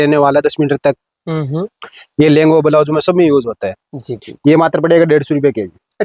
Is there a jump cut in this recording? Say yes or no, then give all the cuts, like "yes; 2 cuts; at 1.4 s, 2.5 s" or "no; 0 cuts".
no; 0 cuts